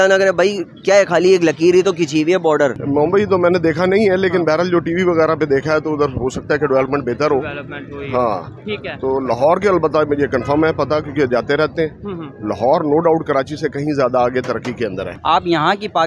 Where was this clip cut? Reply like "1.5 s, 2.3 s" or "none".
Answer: 2.8 s, 15.1 s